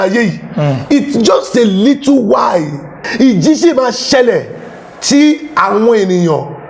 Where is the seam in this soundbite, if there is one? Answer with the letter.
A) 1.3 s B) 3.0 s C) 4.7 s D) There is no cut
B